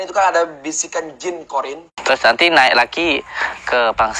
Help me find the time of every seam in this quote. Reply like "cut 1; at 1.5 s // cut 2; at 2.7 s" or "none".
cut 1; at 1.9 s